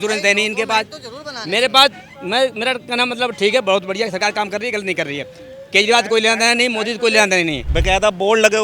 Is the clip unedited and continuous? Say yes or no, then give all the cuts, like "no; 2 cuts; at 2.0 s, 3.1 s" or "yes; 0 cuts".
no; 1 cut; at 7.7 s